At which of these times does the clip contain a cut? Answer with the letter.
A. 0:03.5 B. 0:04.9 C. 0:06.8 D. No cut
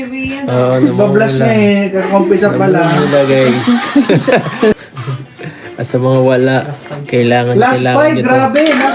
B